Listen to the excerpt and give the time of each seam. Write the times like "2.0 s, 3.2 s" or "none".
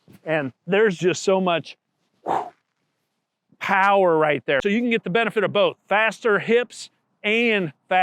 4.6 s